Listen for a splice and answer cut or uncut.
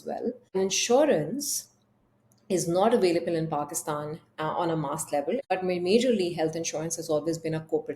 cut